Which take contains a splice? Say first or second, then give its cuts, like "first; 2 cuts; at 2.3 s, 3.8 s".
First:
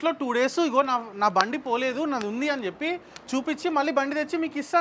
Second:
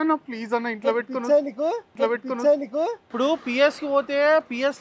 second; 1 cut; at 3.0 s